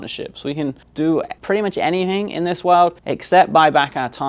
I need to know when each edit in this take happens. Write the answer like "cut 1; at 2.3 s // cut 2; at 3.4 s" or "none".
cut 1; at 1.1 s // cut 2; at 3.1 s